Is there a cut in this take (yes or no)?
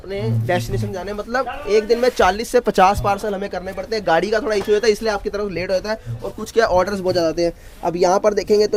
no